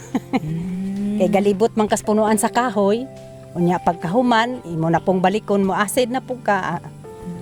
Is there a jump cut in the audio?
no; 0 cuts

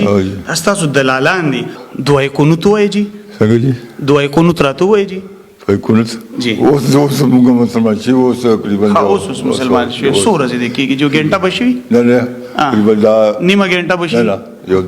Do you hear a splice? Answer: yes; 1 cut; at 1.8 s

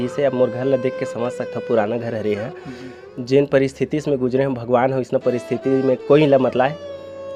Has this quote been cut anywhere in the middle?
no; 0 cuts

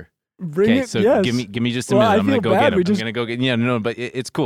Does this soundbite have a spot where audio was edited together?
yes; 1 cut; at 3.1 s

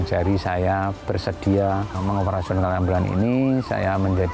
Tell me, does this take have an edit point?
yes; 1 cut; at 1.9 s

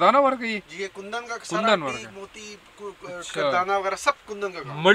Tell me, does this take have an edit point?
no; 0 cuts

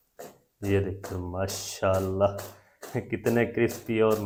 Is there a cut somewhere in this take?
no; 0 cuts

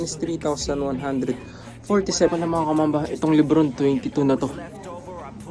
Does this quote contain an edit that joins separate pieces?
yes; 1 cut; at 2.3 s

